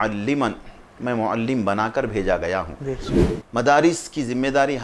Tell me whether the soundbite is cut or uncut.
cut